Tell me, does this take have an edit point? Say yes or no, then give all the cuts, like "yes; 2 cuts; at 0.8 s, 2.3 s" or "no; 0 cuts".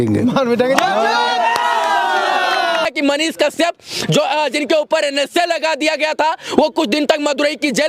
yes; 1 cut; at 2.8 s